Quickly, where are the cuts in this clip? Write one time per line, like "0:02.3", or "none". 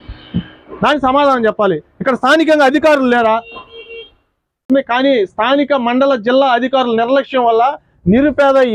0:04.6

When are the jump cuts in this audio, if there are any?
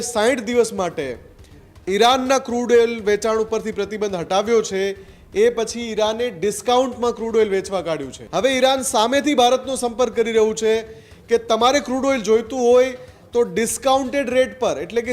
0:08.2

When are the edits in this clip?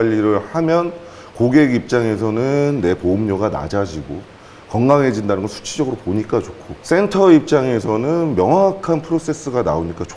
none

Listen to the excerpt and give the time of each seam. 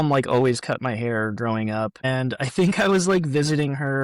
0:02.0

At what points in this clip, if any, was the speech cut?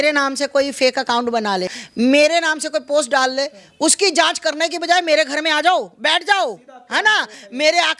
0:01.8

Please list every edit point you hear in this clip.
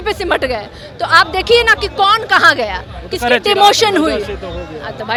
none

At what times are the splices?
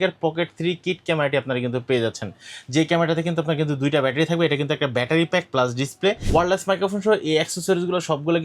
0:06.2

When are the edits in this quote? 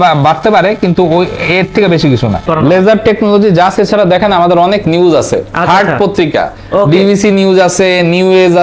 0:02.5

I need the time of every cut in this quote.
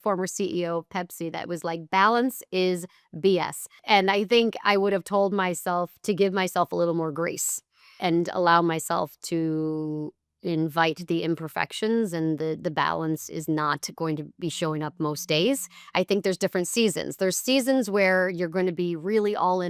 0:03.7

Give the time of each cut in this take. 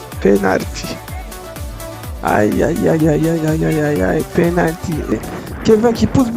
0:05.1

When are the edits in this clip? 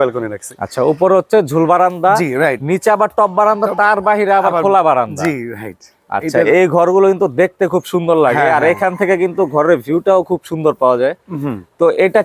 none

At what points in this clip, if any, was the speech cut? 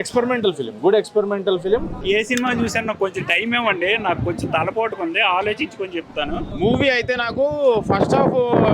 0:02.0
0:06.5

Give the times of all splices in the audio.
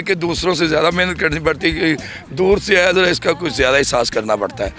none

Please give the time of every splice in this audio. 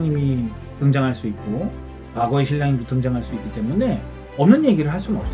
none

